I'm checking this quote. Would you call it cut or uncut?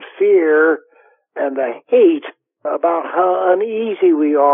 uncut